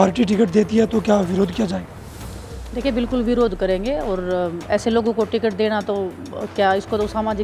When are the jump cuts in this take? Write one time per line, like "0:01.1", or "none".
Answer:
none